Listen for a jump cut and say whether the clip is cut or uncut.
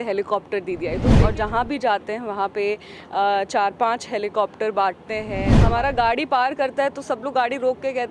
cut